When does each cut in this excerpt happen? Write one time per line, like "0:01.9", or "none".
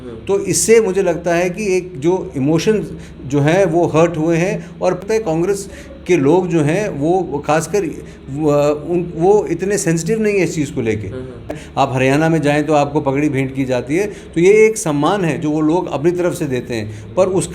0:05.0
0:11.5